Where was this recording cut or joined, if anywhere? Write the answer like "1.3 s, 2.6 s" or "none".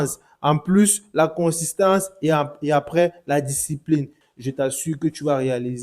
4.2 s

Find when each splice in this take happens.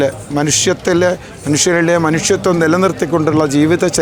none

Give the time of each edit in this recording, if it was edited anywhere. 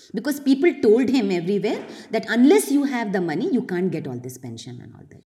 none

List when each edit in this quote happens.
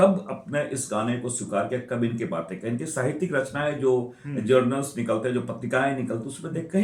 none

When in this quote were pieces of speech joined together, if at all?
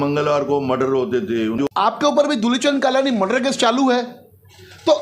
1.6 s

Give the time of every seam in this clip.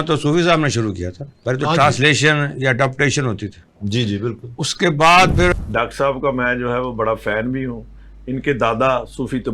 5.5 s

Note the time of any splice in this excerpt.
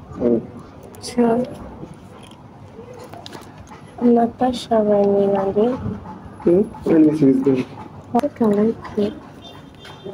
8.2 s

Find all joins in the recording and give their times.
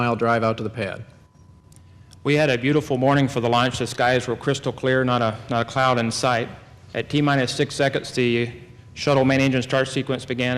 6.4 s

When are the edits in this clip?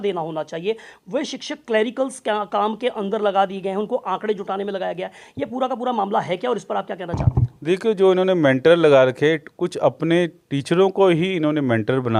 none

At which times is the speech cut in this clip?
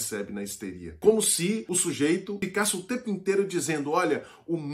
1.0 s, 1.7 s, 2.4 s

